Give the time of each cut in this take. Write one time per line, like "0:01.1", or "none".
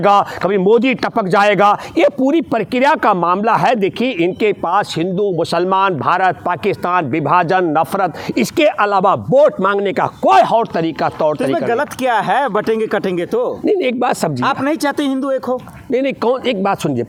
none